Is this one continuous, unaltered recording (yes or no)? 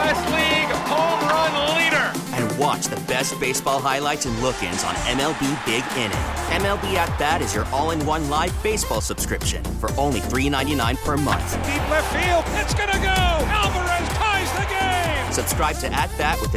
yes